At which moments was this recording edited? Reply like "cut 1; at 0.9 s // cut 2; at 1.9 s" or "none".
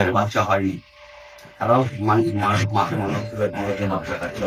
none